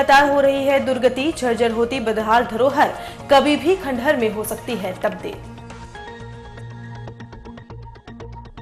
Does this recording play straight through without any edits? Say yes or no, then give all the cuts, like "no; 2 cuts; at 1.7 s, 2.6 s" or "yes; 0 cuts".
yes; 0 cuts